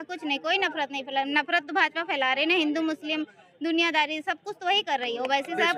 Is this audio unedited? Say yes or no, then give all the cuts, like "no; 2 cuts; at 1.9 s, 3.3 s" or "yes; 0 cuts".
yes; 0 cuts